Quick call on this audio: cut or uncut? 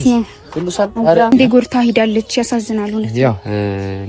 cut